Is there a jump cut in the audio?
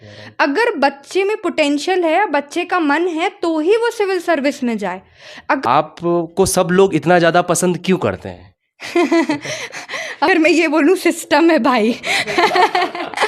yes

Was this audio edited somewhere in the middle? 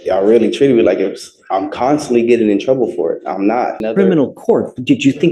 yes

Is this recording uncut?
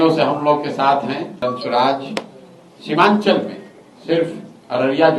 no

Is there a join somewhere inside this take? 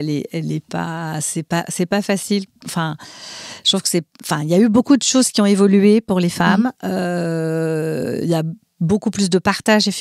no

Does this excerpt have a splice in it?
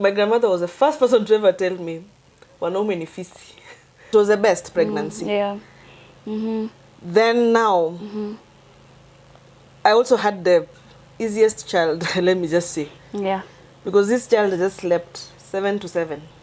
yes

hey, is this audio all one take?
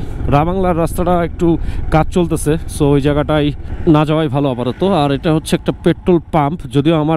no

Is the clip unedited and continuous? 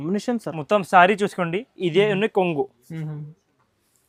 yes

